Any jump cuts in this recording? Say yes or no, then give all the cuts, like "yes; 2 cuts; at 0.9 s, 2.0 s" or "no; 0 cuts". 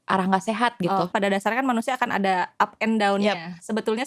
yes; 1 cut; at 1.1 s